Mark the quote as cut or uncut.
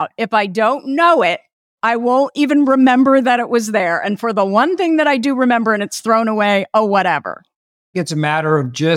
cut